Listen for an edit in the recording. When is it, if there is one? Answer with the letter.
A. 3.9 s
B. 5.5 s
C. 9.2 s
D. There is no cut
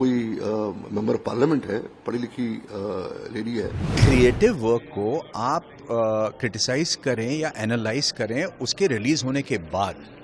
A